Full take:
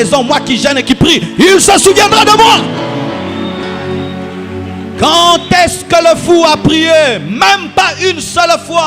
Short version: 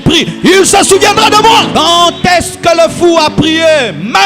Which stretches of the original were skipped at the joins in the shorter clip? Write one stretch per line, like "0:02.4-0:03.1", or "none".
0:02.6-0:05.0